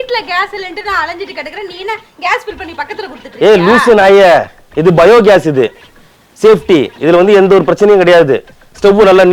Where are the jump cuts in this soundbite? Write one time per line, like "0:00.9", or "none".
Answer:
none